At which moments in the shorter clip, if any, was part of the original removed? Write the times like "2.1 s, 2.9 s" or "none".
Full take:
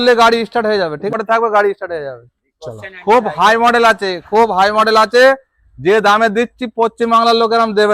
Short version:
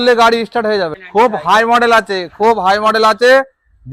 1.0 s

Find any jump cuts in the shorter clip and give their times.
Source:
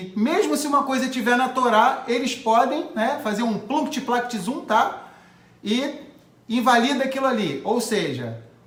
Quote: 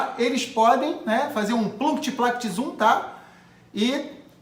none

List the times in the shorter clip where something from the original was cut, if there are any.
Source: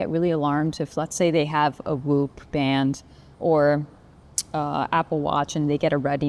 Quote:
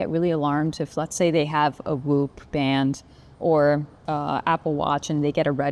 3.9 s

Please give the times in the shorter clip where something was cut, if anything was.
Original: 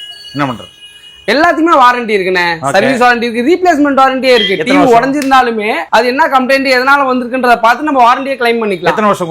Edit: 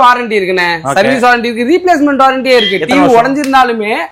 none

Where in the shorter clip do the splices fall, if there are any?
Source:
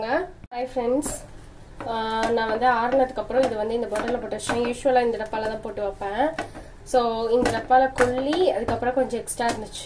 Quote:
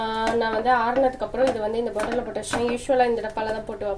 none

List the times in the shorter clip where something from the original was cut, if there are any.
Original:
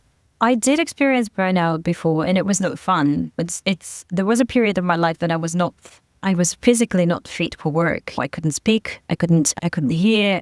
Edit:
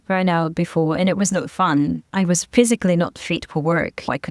2.0 s

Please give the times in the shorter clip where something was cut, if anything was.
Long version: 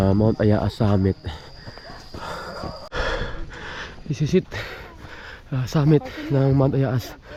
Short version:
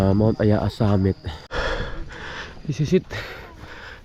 1.4 s

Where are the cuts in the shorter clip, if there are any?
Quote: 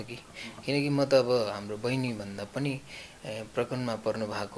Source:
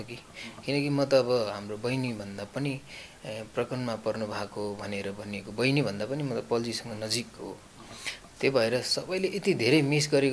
none

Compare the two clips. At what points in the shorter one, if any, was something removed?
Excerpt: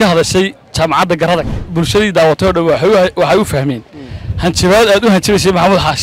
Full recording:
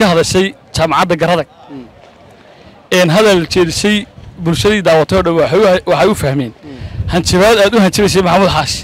1.6 s

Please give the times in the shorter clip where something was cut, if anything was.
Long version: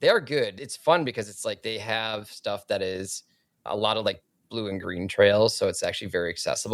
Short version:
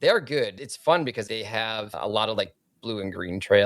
1.4 s

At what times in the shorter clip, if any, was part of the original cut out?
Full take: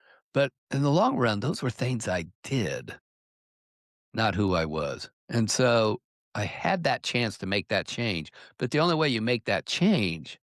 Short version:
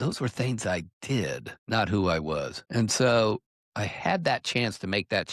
1.5 s, 2.6 s

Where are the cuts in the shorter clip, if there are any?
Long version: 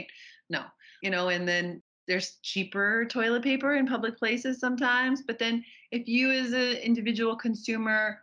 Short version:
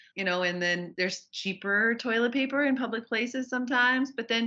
0.9 s

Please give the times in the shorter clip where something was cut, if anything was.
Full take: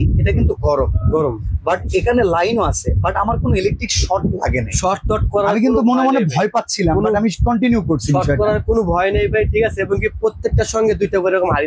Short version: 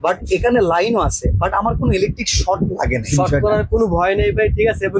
3.1 s

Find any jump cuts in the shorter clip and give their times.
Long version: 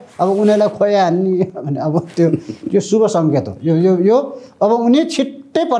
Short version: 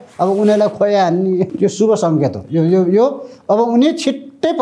1.5 s

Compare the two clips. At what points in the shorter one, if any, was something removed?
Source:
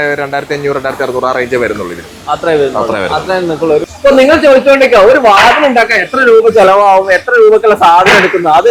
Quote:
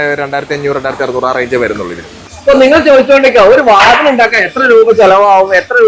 2.3 s

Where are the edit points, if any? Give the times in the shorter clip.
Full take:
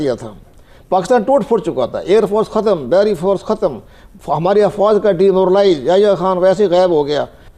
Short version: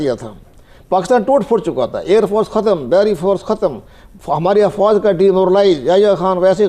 none

